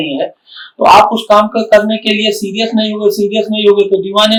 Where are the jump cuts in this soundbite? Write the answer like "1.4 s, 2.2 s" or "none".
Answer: none